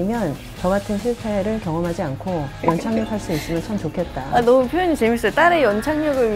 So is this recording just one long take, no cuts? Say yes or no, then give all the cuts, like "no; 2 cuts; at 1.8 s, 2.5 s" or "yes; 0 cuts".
no; 1 cut; at 2.6 s